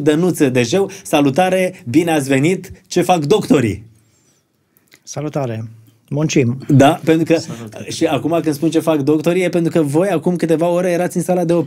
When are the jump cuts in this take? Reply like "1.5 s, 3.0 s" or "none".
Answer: none